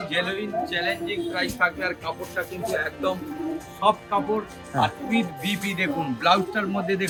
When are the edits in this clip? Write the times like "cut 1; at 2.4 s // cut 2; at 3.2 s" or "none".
none